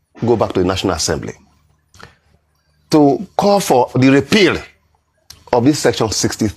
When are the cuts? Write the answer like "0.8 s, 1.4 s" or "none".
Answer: 3.9 s